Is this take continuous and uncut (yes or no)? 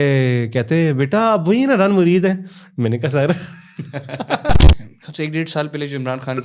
no